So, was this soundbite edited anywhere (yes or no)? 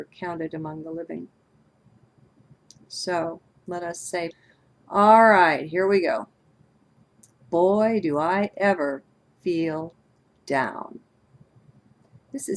no